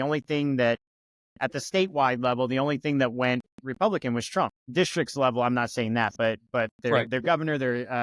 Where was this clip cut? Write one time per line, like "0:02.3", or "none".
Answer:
none